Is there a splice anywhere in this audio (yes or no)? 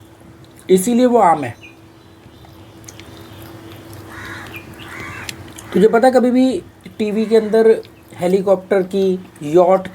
no